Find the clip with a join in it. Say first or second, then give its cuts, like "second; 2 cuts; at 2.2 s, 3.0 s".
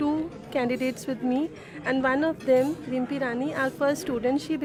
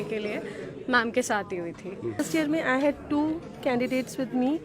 second; 1 cut; at 2.2 s